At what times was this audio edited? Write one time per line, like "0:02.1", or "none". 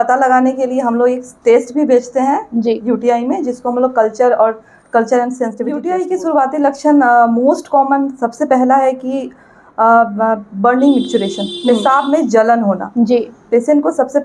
0:05.7